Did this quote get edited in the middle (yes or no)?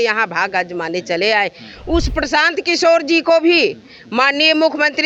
no